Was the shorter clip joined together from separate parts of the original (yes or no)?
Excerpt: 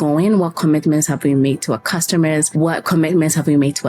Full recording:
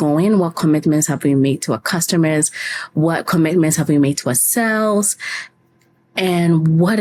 yes